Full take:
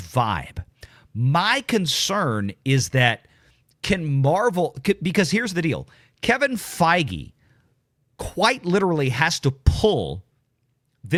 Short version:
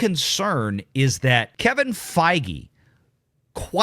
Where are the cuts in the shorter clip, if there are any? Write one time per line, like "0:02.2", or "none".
0:01.5